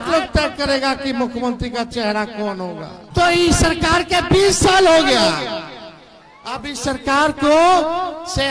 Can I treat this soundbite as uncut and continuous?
no; 1 cut; at 3.1 s

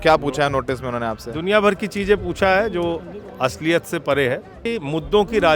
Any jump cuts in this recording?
yes; 1 cut; at 4.6 s

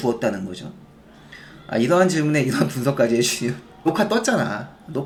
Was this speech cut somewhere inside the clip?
no; 0 cuts

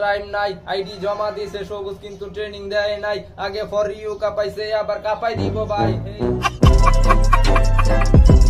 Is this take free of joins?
yes; 0 cuts

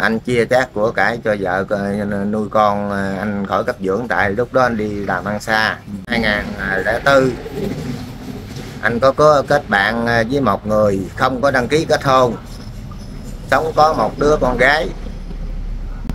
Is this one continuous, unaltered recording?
no; 1 cut; at 6.1 s

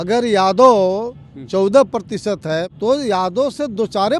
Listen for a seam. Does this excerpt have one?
yes; 1 cut; at 2.7 s

